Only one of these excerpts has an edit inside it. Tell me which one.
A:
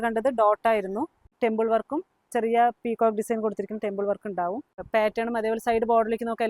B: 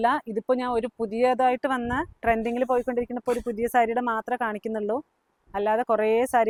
A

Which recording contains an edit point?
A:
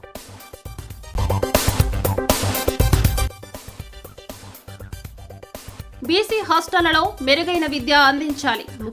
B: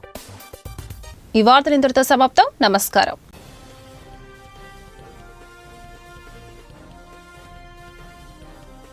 A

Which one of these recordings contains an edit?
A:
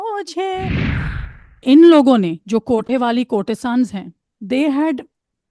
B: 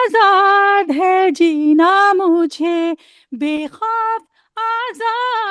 A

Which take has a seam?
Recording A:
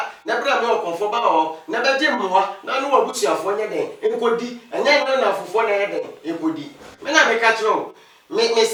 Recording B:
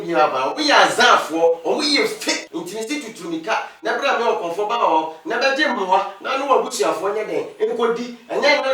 B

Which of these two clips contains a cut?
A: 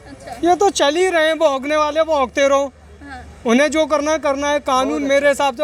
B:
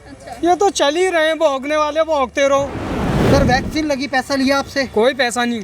B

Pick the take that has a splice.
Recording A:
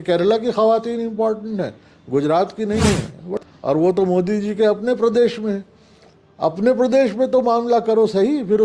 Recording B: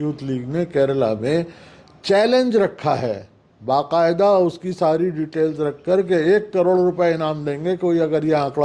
A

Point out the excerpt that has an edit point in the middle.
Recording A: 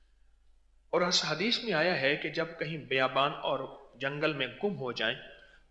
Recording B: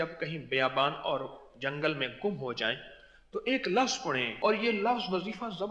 B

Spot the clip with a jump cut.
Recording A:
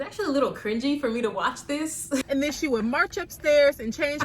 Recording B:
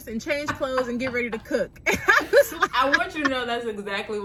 A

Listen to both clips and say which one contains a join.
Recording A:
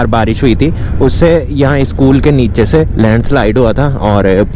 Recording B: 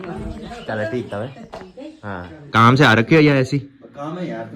B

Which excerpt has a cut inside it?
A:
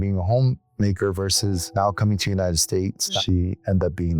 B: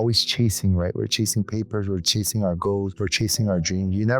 A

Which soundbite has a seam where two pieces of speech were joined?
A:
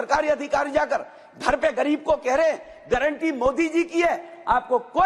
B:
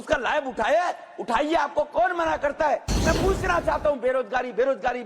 B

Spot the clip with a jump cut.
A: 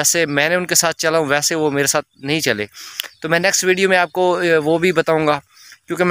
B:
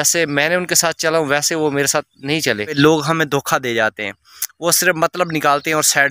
B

